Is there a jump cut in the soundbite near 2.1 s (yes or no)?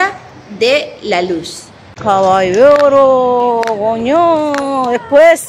yes